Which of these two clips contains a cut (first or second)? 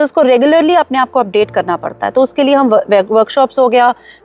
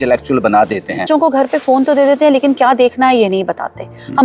second